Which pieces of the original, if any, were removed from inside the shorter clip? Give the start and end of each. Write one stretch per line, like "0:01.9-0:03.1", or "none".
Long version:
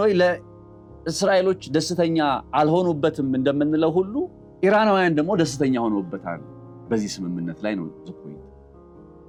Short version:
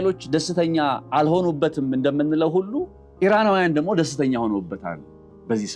none